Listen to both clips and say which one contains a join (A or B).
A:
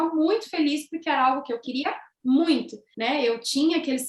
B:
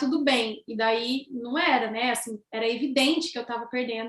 A